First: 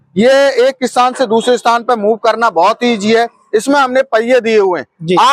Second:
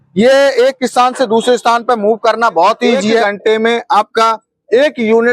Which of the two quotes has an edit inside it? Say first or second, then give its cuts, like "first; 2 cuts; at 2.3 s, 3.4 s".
second; 1 cut; at 3.2 s